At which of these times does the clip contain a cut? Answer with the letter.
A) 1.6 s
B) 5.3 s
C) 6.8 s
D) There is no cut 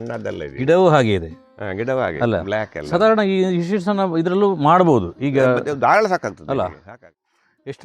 C